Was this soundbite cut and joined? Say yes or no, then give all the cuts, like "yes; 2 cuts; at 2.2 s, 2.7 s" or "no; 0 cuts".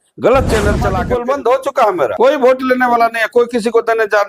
yes; 1 cut; at 0.9 s